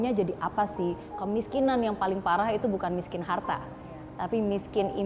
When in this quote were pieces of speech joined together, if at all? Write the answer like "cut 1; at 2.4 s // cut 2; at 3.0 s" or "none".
cut 1; at 1.1 s

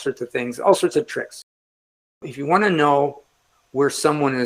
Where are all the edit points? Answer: cut 1; at 2.0 s

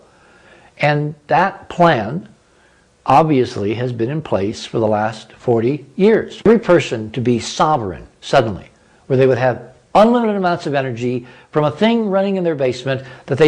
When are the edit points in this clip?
cut 1; at 6.5 s

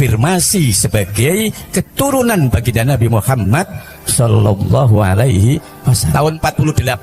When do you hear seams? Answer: cut 1; at 6.1 s

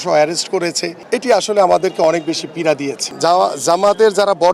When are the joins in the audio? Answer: cut 1; at 0.9 s // cut 2; at 3.0 s

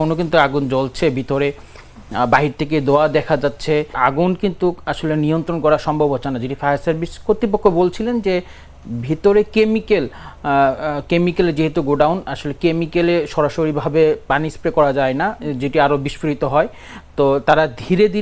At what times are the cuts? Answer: cut 1; at 4.0 s

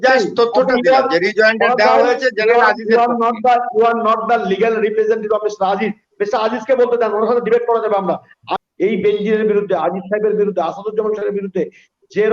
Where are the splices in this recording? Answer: cut 1; at 8.4 s

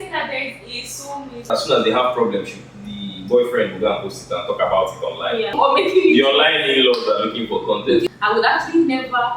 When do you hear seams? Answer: cut 1; at 1.5 s // cut 2; at 5.5 s // cut 3; at 8.0 s

